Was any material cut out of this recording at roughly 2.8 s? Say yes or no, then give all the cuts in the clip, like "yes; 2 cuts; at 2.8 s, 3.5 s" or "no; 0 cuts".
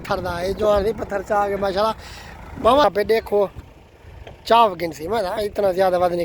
yes; 1 cut; at 2.8 s